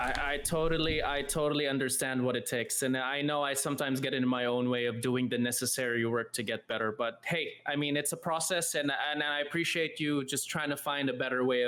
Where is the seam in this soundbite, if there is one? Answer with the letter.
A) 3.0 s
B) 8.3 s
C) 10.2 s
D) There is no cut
D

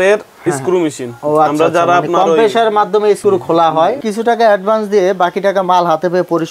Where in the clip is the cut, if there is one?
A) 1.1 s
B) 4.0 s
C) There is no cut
B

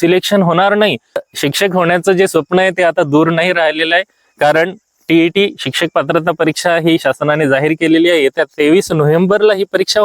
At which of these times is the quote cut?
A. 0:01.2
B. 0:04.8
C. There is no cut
A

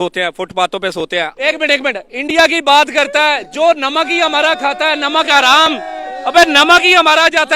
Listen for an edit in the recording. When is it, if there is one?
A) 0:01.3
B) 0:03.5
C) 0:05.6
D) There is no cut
A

